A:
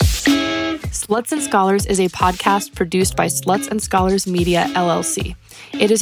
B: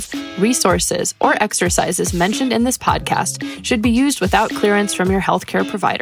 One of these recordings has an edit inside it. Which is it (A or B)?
A